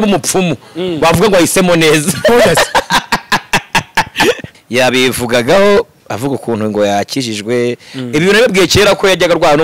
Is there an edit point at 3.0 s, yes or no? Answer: no